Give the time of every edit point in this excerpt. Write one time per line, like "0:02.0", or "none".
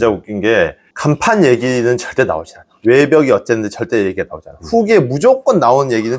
none